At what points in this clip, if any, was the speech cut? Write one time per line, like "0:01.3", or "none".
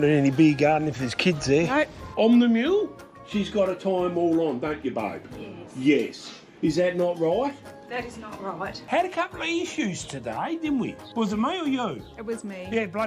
0:02.0
0:08.8
0:11.0